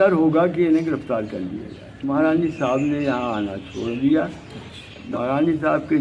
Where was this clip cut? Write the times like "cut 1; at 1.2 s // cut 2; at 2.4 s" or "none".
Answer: cut 1; at 2.1 s // cut 2; at 5.0 s